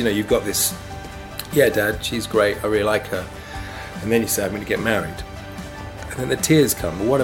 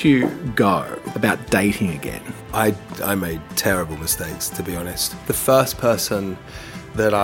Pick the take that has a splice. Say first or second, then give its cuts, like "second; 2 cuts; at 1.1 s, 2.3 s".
second; 3 cuts; at 1.0 s, 2.3 s, 5.1 s